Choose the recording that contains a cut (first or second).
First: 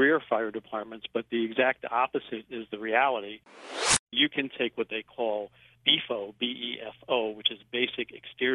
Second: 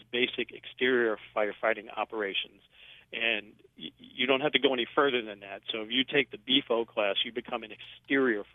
first